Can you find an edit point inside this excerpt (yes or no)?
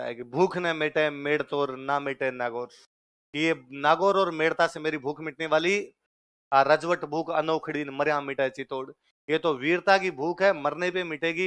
no